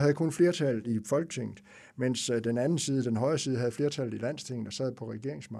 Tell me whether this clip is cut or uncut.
cut